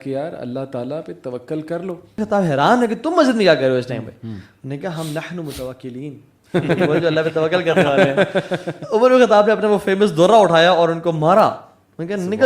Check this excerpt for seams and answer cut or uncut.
cut